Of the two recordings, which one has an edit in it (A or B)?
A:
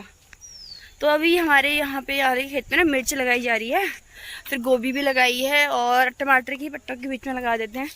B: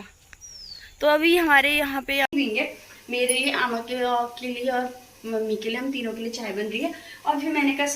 B